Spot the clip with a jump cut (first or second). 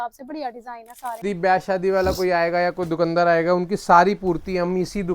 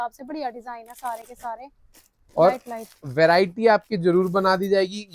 first